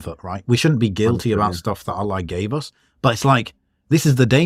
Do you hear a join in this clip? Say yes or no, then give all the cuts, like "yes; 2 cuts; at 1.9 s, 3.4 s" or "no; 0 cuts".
no; 0 cuts